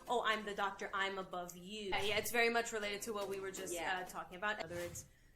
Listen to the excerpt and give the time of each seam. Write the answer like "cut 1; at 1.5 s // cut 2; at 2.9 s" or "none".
cut 1; at 1.9 s // cut 2; at 4.6 s